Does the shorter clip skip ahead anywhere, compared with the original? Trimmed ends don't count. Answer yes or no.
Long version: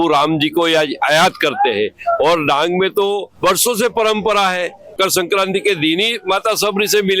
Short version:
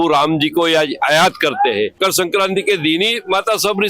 yes